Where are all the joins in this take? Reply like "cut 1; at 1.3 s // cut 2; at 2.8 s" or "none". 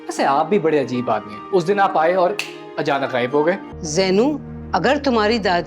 cut 1; at 3.7 s